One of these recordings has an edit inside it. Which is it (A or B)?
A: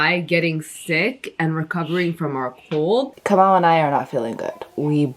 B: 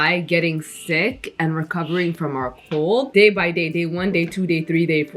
A